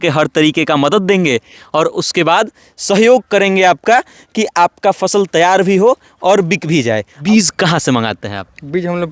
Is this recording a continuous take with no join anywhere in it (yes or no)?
no